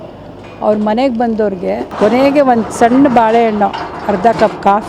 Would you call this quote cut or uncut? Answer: cut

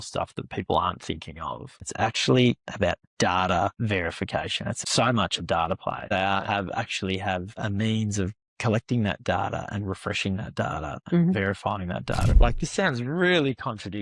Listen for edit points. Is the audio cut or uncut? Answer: cut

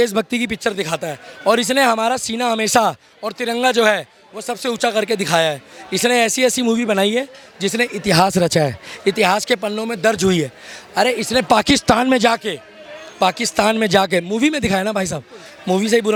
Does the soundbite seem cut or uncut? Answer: uncut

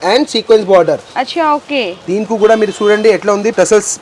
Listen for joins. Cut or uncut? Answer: uncut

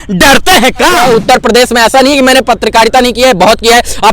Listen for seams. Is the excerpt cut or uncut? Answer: cut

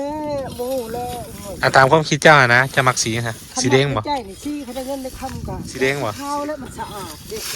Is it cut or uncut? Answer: cut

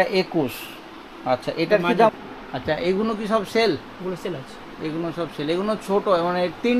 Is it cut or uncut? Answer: cut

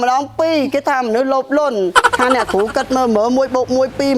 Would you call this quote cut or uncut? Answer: cut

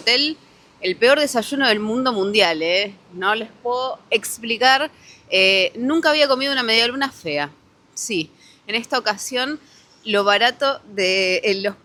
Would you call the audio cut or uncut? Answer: uncut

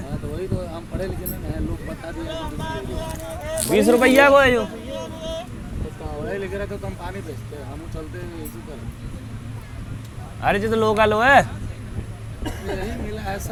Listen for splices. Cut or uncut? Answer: uncut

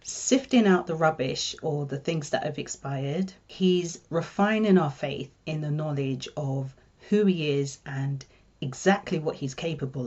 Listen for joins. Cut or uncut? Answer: cut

